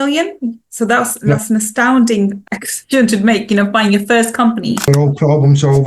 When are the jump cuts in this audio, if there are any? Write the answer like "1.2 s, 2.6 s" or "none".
2.5 s, 4.8 s